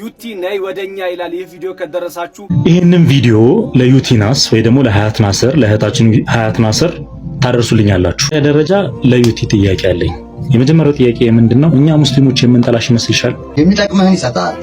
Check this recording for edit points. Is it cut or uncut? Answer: cut